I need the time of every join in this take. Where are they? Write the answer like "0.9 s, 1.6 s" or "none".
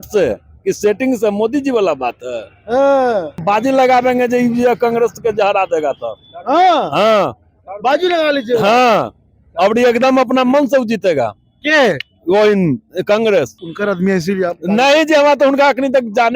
3.4 s, 13.6 s